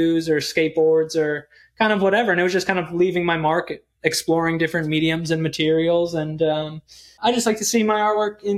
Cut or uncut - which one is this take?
cut